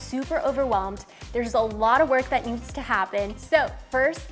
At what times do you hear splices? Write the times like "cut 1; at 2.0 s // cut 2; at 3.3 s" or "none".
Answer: cut 1; at 3.4 s